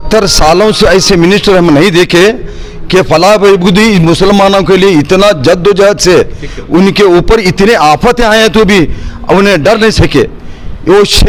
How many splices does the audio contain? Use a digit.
0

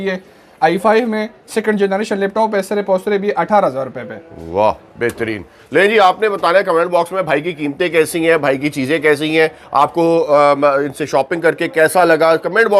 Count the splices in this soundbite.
0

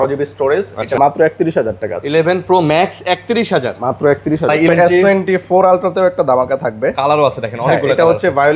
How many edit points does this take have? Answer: 2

